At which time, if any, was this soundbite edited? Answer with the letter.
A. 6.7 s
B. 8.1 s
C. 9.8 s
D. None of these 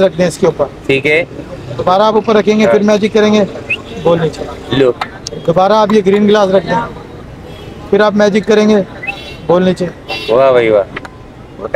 D